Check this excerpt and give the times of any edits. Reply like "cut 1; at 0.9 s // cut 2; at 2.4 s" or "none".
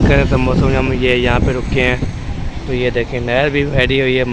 none